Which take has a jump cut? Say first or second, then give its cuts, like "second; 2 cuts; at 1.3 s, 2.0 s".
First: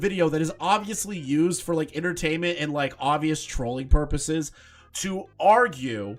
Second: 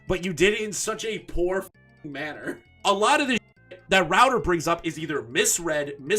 second; 1 cut; at 2.6 s